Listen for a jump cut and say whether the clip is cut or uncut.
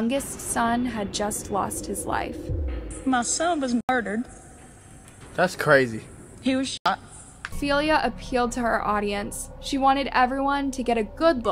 cut